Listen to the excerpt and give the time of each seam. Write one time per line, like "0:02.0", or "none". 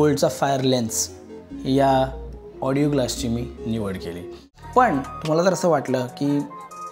0:04.4